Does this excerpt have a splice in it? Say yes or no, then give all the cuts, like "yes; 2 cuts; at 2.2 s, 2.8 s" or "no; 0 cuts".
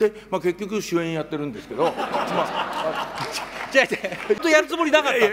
yes; 1 cut; at 4.4 s